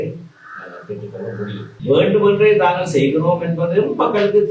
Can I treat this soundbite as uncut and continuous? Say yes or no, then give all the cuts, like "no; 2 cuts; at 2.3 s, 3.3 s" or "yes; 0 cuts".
no; 1 cut; at 1.6 s